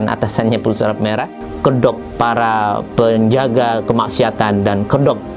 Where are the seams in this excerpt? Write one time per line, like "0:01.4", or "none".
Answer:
0:01.4